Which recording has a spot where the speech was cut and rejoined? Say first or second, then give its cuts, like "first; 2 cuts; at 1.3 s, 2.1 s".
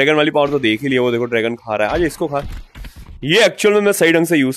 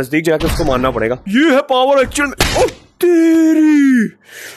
second; 1 cut; at 1.2 s